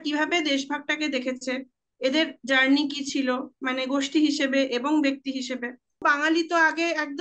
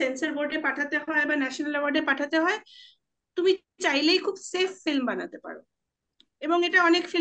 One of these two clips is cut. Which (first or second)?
first